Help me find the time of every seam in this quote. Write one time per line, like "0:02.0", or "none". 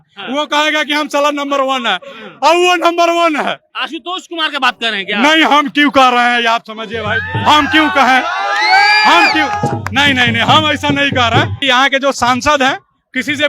0:11.6